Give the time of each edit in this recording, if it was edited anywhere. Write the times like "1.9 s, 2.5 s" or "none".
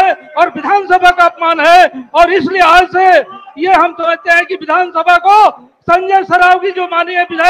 none